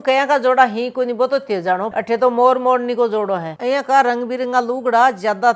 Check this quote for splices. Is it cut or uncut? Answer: cut